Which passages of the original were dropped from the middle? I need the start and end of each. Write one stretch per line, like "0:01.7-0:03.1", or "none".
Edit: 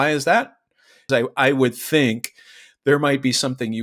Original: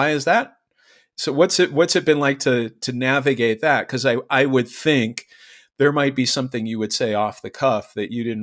0:01.0-0:03.9